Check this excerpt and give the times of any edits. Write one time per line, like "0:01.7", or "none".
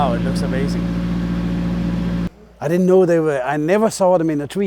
0:02.3

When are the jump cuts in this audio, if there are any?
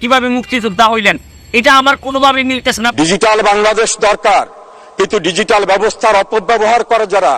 0:02.9

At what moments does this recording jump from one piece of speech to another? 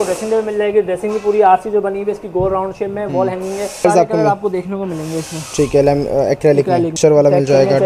0:03.8
0:07.0

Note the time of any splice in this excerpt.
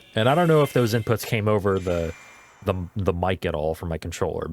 none

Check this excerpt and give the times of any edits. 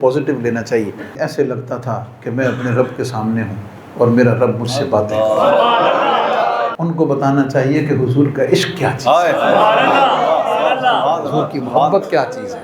0:01.2
0:06.7

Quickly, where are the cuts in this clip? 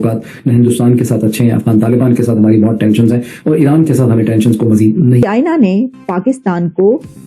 0:05.2

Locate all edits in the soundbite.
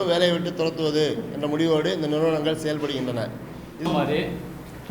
0:03.9

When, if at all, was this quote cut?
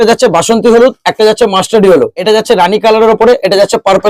0:02.2

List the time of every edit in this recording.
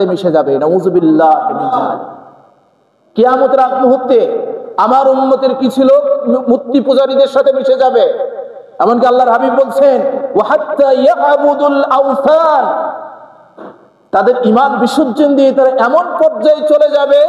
none

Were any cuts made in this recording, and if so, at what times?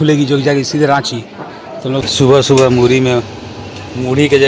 0:02.1

